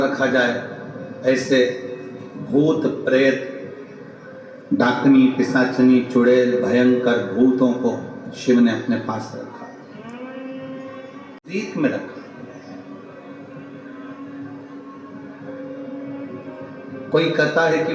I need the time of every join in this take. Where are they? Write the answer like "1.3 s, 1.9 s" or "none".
11.5 s